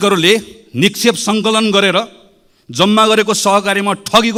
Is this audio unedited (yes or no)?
yes